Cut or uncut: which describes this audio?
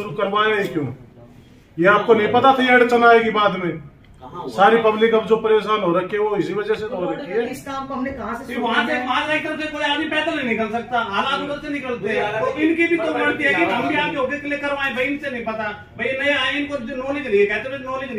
cut